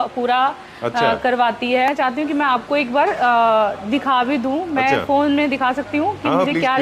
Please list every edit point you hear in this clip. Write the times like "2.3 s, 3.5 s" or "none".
1.9 s